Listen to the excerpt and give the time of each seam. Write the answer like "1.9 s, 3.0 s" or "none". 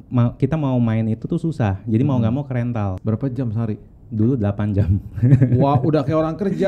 3.0 s